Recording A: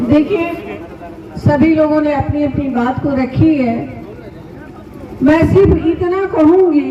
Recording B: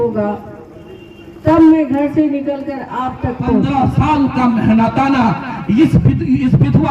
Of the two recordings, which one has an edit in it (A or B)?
B